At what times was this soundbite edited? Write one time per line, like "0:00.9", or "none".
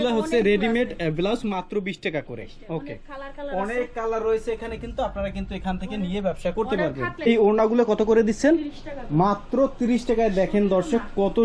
0:07.3